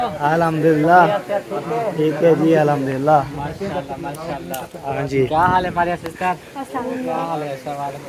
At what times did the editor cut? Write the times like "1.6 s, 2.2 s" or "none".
none